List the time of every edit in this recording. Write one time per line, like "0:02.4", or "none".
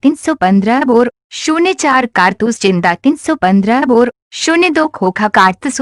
none